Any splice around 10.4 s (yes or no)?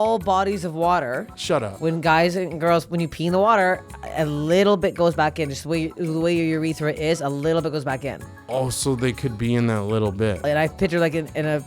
yes